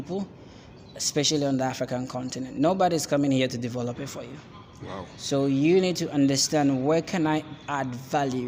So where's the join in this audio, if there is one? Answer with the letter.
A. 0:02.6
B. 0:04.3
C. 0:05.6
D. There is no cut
D